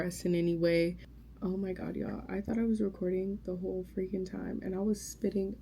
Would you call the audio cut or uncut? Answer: cut